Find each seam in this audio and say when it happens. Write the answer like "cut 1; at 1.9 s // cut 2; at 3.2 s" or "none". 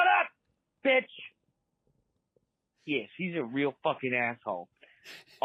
none